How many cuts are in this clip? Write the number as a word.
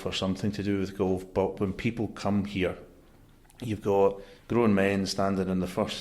one